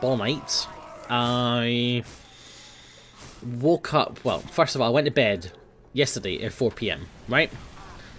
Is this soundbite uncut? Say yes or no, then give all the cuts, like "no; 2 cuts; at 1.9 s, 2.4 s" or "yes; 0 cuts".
no; 1 cut; at 7.1 s